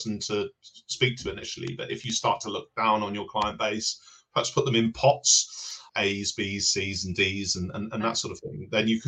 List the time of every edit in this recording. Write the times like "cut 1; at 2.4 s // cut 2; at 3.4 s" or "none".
cut 1; at 5.9 s